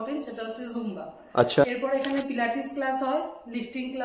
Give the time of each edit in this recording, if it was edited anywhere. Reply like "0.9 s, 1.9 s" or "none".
1.7 s